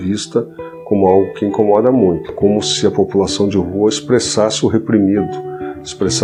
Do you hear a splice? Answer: no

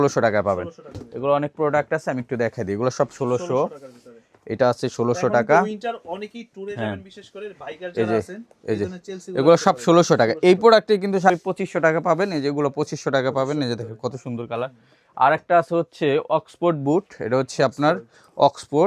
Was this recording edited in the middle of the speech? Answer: yes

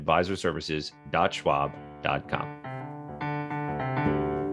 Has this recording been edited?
yes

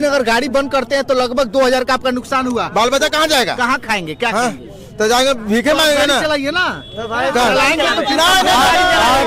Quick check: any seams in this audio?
no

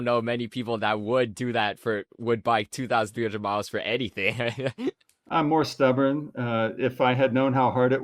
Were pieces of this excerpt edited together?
yes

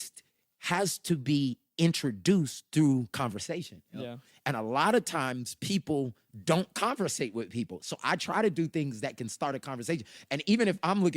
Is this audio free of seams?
no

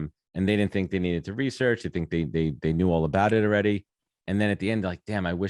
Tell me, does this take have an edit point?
no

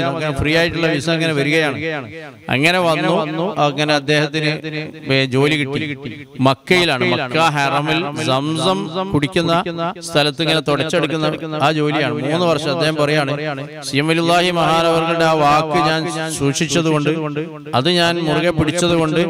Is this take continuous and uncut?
yes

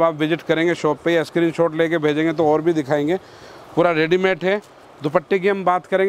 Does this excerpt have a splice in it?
no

